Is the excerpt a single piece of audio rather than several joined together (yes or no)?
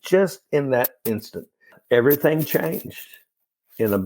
no